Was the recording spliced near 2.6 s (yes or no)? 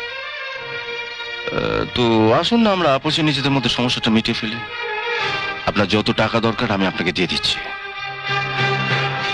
no